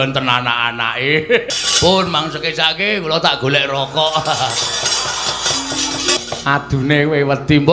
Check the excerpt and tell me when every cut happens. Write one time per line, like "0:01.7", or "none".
0:01.4
0:06.2